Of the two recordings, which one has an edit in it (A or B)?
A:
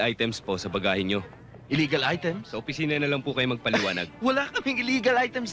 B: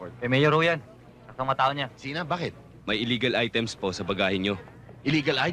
B